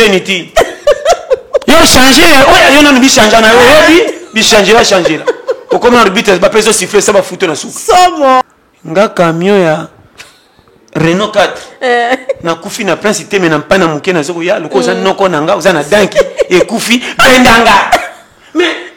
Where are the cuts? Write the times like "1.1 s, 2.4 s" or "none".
8.4 s